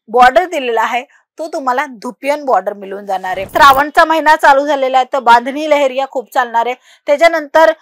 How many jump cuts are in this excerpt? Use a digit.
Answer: 1